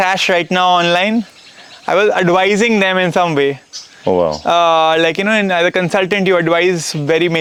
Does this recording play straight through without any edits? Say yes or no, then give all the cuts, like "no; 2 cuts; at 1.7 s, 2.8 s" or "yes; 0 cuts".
yes; 0 cuts